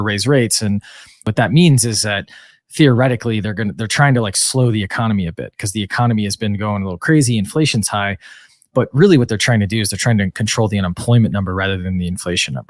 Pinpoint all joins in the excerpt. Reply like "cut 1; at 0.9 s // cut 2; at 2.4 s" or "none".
cut 1; at 1.3 s